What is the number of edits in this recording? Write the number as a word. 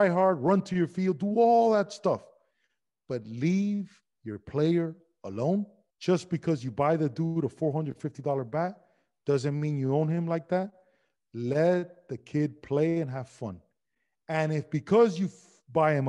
one